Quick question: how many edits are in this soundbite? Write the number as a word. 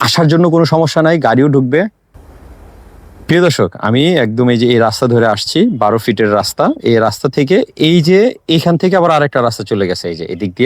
one